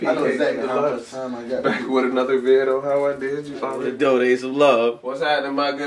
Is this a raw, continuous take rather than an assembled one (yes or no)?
no